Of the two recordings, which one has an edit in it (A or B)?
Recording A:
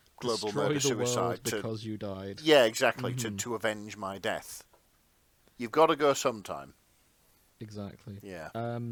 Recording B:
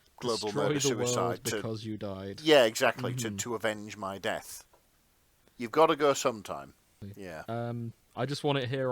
B